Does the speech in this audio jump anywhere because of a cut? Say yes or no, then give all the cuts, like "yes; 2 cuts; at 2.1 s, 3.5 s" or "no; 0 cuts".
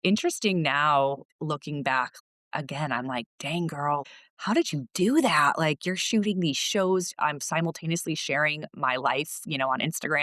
yes; 3 cuts; at 1.3 s, 2.1 s, 4.0 s